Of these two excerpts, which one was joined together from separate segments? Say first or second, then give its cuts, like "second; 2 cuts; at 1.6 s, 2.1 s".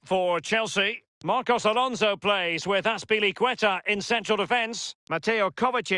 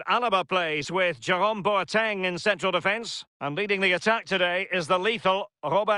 first; 1 cut; at 1.1 s